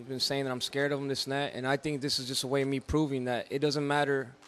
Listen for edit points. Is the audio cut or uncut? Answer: uncut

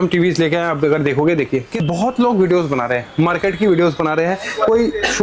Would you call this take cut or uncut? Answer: cut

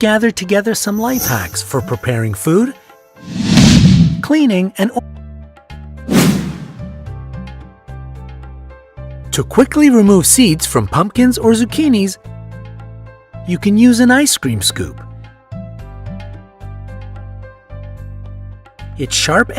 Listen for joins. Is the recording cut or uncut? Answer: uncut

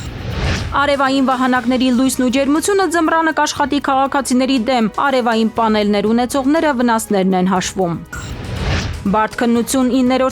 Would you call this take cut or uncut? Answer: cut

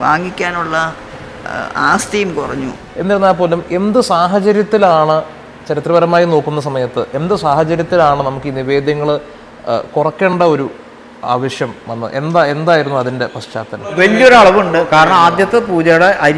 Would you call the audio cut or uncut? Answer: cut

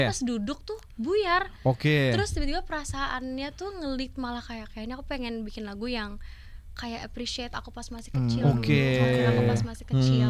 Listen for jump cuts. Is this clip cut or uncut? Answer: uncut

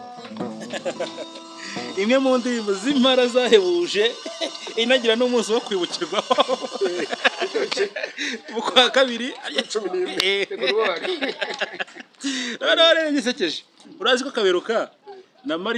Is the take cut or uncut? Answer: uncut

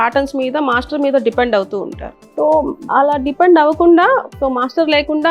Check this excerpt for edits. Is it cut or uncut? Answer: cut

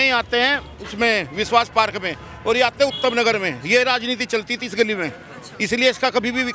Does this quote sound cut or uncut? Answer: uncut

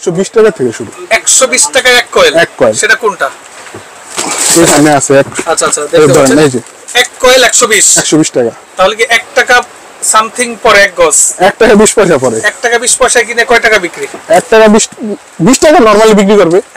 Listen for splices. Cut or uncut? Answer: uncut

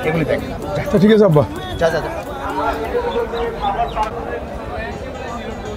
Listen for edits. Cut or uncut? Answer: uncut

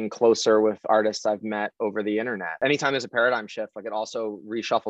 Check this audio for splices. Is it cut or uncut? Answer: cut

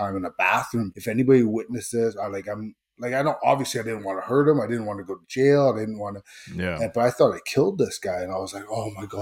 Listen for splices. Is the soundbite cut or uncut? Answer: cut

